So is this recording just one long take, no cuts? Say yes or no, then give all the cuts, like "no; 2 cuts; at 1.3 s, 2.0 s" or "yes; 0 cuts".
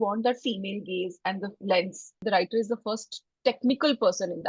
no; 1 cut; at 2.2 s